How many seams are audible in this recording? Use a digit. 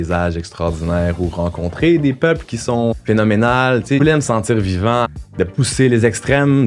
3